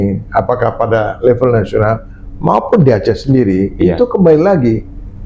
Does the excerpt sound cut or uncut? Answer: uncut